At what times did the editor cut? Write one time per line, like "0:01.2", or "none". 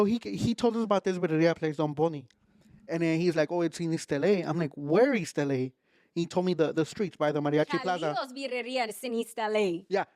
none